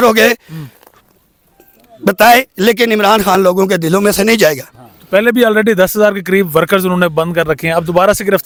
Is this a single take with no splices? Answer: yes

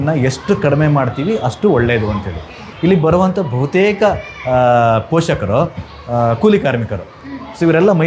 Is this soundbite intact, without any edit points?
no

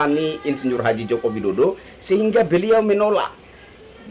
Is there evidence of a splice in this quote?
no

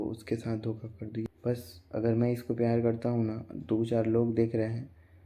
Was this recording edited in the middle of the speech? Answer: yes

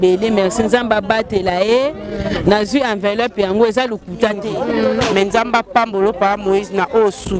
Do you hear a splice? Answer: yes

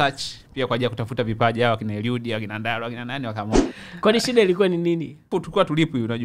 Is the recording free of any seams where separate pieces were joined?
no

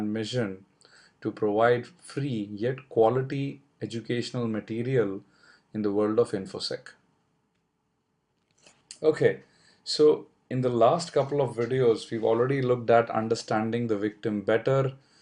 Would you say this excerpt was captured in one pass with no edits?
no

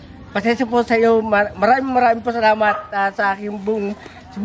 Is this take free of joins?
no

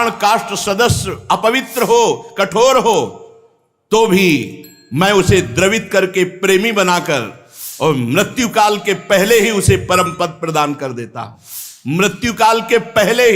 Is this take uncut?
yes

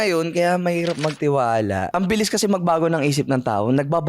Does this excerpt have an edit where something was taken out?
yes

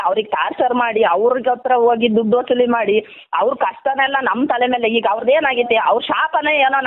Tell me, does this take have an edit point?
no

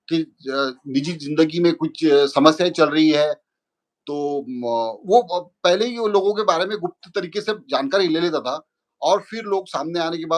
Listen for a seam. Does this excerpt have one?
no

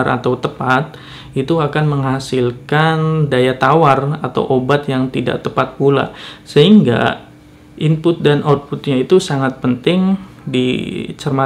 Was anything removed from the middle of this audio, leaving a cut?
no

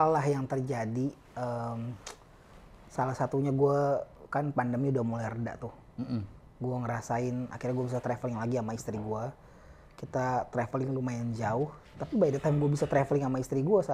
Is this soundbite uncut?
yes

